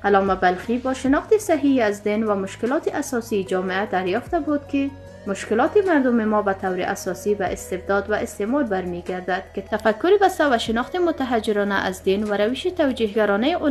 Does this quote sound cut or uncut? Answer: uncut